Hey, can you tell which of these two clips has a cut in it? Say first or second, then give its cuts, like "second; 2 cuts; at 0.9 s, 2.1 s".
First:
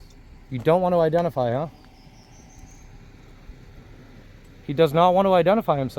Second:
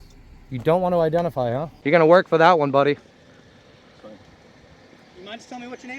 second; 1 cut; at 1.7 s